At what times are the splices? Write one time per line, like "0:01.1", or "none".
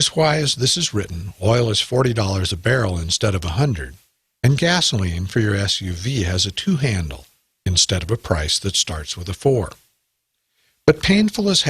0:08.7